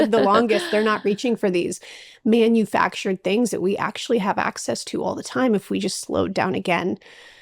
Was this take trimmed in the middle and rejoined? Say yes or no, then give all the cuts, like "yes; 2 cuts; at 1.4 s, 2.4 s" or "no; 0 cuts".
no; 0 cuts